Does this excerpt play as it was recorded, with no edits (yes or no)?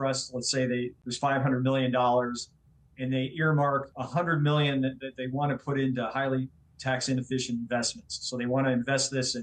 no